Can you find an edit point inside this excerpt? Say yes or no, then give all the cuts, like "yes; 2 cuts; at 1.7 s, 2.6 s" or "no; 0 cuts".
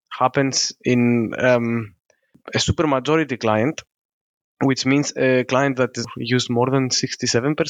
yes; 1 cut; at 6.1 s